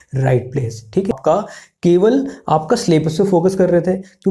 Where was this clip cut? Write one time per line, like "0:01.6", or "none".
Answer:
0:01.1